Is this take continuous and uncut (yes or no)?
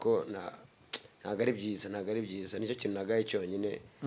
yes